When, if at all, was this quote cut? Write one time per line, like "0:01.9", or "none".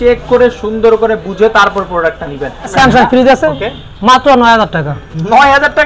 0:02.7